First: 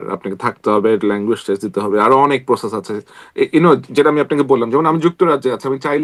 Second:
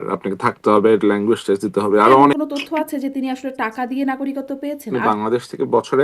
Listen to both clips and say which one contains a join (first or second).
second